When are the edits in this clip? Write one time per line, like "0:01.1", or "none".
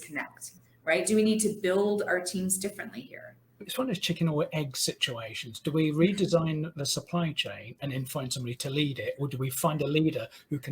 0:03.7